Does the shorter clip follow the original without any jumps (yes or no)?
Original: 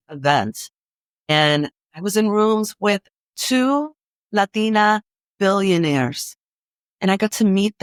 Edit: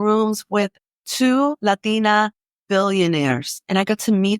no